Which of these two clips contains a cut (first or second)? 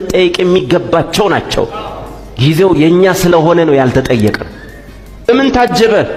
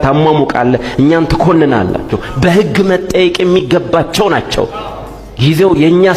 second